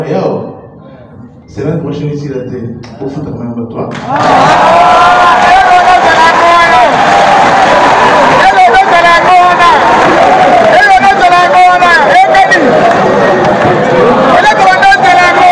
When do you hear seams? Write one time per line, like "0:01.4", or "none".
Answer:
none